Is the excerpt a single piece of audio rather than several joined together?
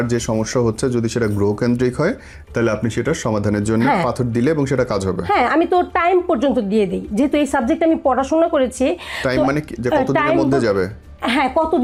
yes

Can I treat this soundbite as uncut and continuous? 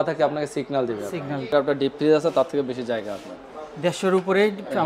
no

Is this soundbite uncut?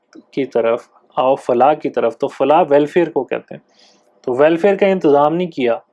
yes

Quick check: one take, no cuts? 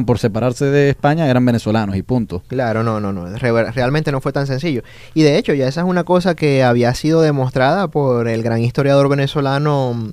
no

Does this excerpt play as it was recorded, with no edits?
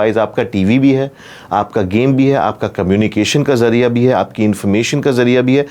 yes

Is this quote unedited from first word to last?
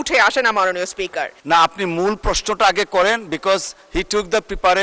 no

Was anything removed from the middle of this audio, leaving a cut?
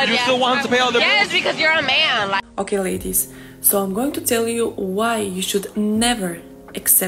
yes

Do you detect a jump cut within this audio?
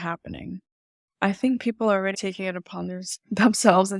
yes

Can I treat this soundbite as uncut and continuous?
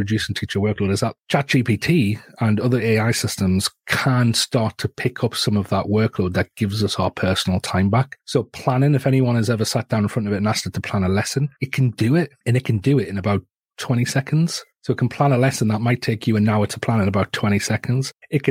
yes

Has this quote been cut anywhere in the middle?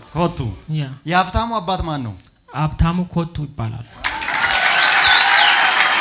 no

